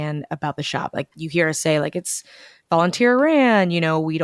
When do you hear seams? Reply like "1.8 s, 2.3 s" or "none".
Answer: 1.1 s